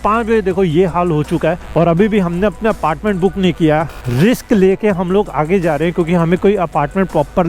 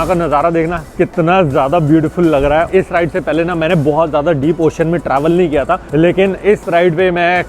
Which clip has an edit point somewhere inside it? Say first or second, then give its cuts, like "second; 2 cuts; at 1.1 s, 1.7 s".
second; 2 cuts; at 2.7 s, 5.8 s